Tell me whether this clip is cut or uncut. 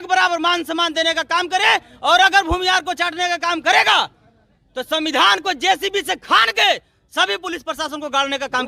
uncut